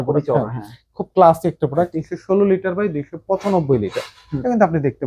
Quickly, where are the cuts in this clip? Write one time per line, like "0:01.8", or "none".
0:01.9